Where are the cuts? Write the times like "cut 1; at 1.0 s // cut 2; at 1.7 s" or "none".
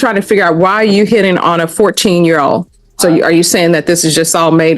cut 1; at 2.8 s